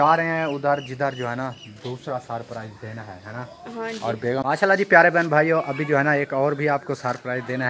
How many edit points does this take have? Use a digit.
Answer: 1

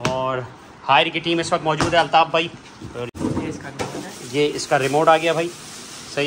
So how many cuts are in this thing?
1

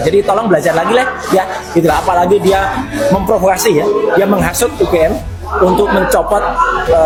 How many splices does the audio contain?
0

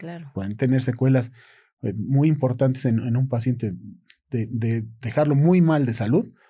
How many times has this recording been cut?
0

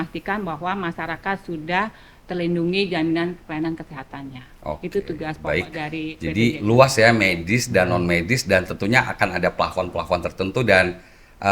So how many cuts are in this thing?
0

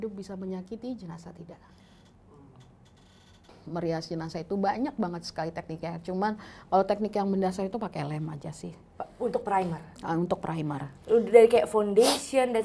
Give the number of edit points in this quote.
1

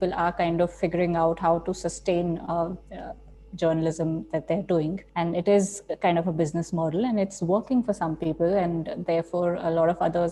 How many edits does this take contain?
1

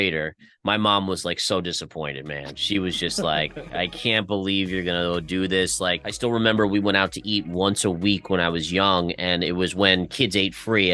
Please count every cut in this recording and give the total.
1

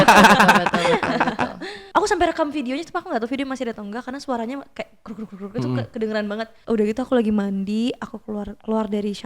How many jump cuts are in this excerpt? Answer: 2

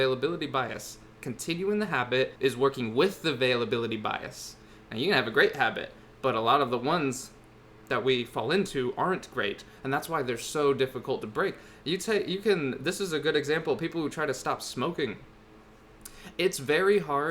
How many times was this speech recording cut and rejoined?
1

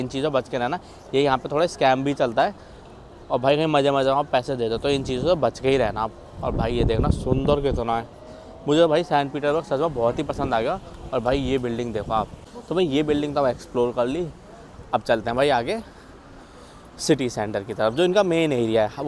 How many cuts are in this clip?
0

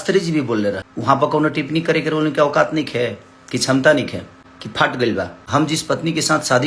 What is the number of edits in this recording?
1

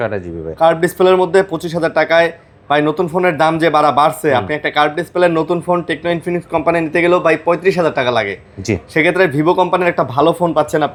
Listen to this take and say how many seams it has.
0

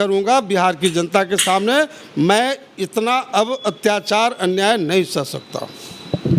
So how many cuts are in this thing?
0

